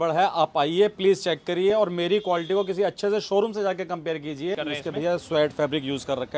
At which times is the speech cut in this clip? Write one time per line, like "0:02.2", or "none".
0:04.6